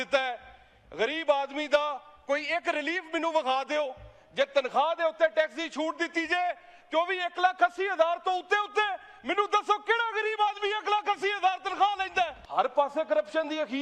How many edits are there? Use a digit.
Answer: 1